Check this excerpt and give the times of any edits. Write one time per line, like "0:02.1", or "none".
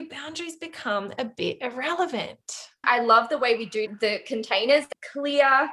0:02.8
0:03.9
0:04.9

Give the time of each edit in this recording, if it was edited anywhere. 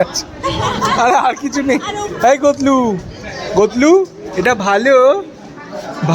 0:02.1

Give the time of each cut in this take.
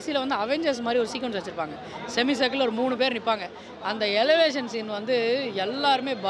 none

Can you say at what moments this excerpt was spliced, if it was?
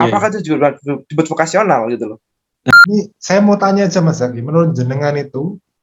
0:02.7

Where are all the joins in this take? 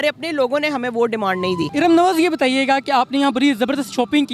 0:01.7

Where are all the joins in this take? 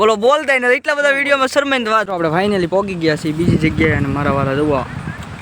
0:02.1

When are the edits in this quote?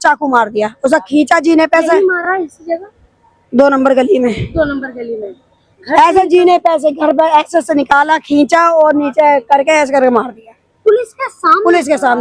none

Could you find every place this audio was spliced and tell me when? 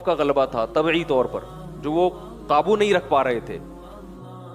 0:03.6

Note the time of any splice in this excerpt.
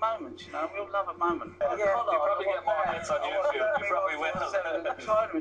0:01.6

